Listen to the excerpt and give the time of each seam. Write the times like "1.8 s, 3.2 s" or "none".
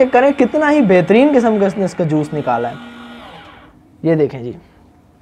none